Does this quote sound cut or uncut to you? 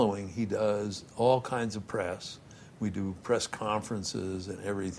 uncut